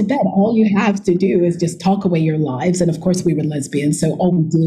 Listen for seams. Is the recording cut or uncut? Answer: uncut